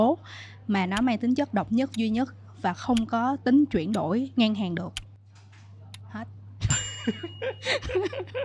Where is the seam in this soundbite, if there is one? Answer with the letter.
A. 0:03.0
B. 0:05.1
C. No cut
C